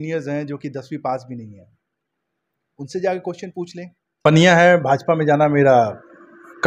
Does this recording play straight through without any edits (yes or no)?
no